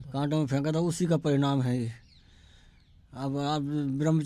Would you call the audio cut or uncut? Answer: uncut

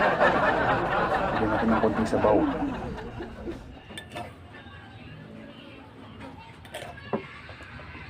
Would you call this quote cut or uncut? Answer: cut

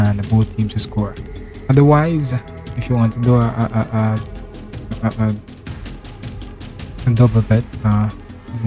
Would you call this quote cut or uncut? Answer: cut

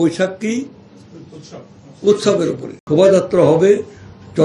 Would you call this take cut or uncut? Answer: cut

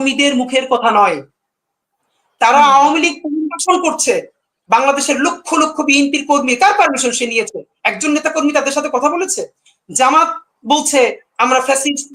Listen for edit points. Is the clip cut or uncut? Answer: uncut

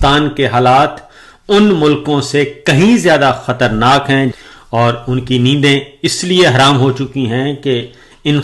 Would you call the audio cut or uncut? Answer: cut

